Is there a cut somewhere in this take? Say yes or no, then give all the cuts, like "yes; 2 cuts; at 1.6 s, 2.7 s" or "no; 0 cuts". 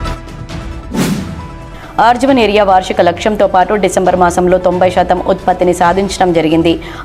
yes; 1 cut; at 1.0 s